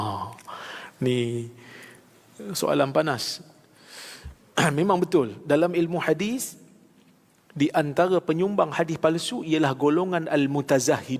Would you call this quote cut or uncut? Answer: uncut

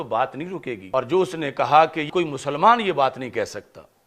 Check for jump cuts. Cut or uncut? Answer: cut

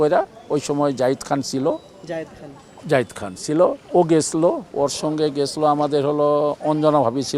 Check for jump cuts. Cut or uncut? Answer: uncut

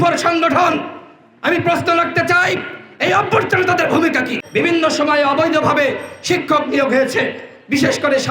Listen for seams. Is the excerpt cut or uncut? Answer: cut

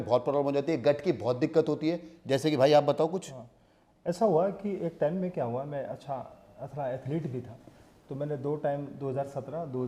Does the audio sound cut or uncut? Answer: uncut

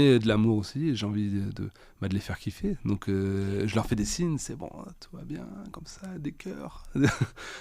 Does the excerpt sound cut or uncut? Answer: uncut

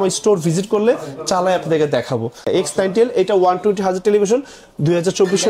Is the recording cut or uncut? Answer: cut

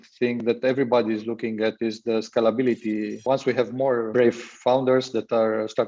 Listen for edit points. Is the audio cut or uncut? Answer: cut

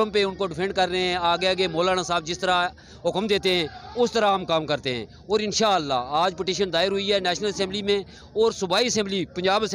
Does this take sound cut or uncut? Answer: uncut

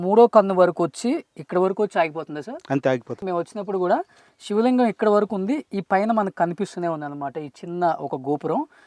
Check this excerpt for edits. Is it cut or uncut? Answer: uncut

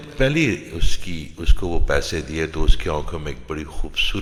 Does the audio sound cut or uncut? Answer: uncut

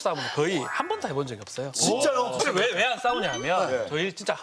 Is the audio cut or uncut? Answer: cut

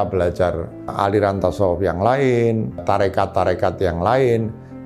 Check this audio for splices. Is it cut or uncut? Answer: cut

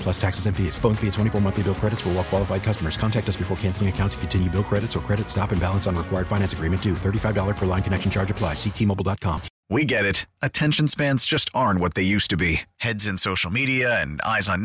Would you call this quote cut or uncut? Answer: cut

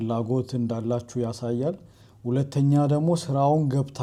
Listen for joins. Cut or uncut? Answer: uncut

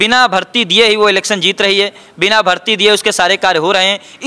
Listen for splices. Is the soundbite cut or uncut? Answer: uncut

